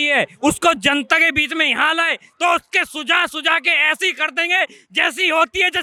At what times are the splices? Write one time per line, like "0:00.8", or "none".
none

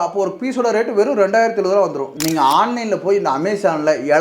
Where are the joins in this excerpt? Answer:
0:02.1

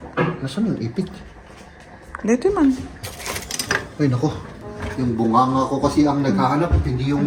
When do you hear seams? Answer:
none

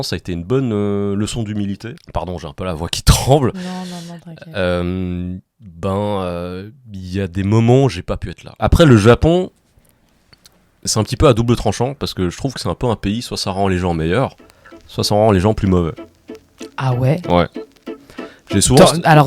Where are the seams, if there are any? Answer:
0:01.9
0:08.5

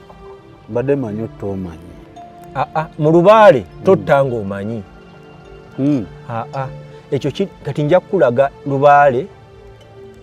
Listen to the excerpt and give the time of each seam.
none

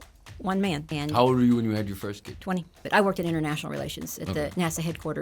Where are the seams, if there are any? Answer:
0:00.9
0:02.6

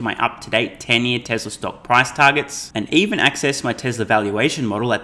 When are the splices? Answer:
none

